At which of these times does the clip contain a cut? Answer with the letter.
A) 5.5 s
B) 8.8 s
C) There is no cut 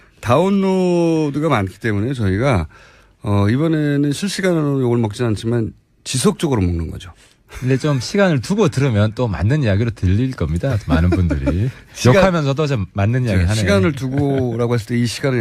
B